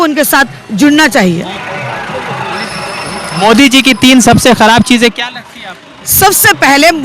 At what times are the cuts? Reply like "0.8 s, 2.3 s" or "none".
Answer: none